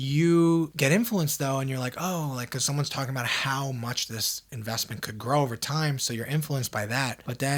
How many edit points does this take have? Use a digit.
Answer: 0